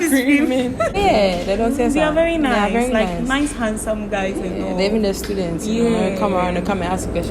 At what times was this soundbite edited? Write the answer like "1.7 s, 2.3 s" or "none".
1.0 s